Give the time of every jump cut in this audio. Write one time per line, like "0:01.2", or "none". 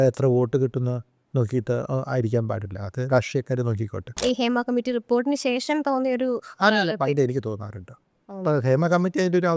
0:04.1

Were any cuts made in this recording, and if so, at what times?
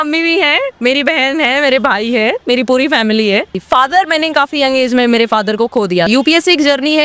0:03.6
0:06.1

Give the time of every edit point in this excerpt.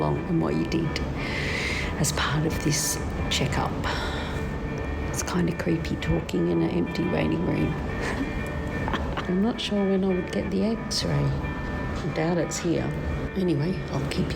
0:04.4
0:09.2
0:11.7
0:13.3

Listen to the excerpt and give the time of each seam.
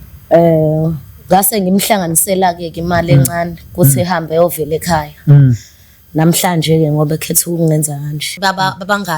0:08.2

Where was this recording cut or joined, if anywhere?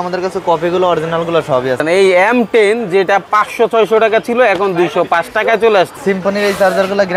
0:01.8
0:05.9

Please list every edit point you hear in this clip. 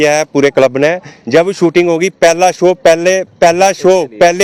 none

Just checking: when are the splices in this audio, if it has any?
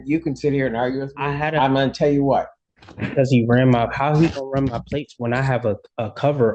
0:02.6

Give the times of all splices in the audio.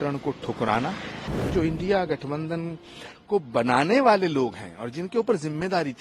0:01.5

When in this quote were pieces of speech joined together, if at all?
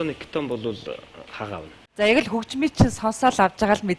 0:01.8

